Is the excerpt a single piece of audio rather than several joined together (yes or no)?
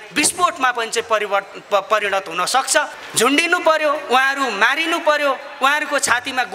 no